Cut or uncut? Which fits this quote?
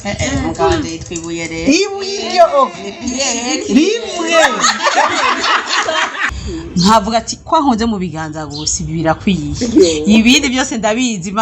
cut